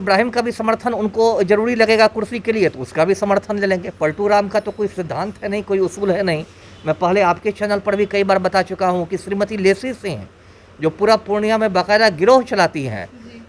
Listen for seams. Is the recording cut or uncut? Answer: uncut